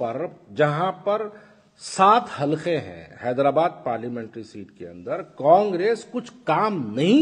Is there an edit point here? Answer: no; 0 cuts

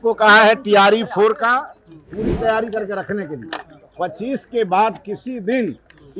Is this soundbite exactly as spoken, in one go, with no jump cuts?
yes; 0 cuts

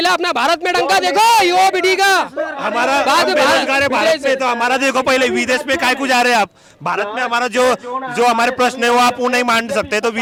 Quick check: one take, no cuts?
yes; 0 cuts

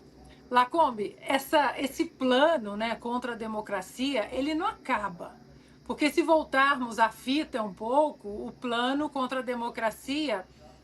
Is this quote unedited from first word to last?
yes; 0 cuts

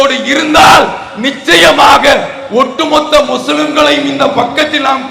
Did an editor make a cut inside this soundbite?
no; 0 cuts

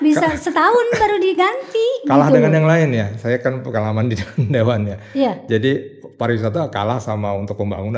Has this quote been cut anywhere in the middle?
no; 0 cuts

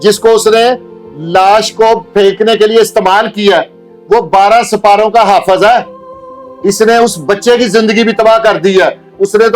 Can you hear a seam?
no; 0 cuts

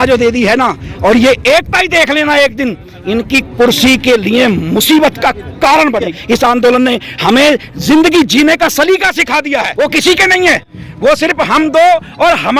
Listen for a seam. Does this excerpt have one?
yes; 2 cuts; at 6.2 s, 9.7 s

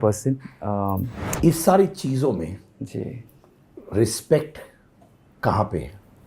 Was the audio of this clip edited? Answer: yes; 1 cut; at 1.2 s

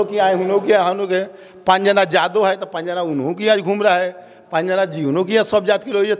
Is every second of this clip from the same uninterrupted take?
yes; 0 cuts

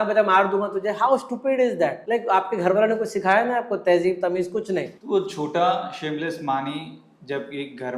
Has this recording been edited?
yes; 2 cuts; at 2.0 s, 5.0 s

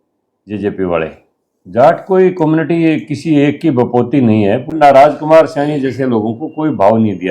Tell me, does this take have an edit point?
yes; 1 cut; at 4.7 s

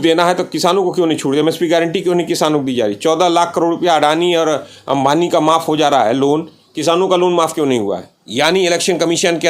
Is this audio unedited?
no; 1 cut; at 8.1 s

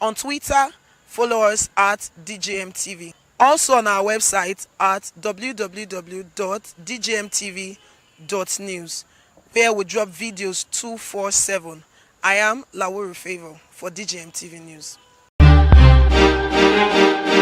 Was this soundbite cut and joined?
yes; 1 cut; at 15.3 s

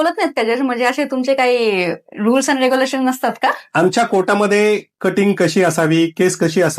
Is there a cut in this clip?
no; 0 cuts

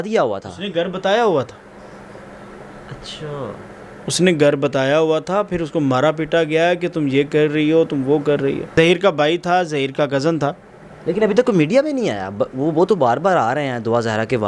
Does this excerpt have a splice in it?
yes; 1 cut; at 8.7 s

